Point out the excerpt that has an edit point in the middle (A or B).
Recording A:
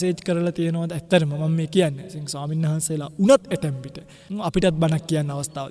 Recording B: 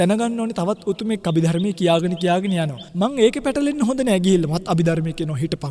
B